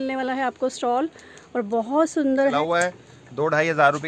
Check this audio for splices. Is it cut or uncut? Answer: cut